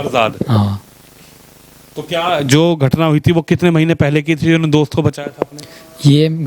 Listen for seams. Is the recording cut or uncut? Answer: uncut